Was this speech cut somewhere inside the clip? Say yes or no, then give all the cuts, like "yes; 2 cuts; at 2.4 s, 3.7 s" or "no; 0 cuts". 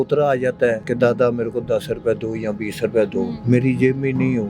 yes; 2 cuts; at 0.9 s, 3.4 s